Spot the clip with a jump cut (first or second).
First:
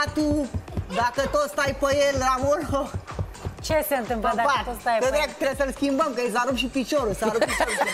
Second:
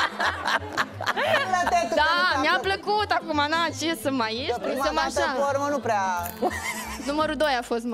second